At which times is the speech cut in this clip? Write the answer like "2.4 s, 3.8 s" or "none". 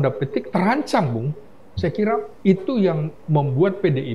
none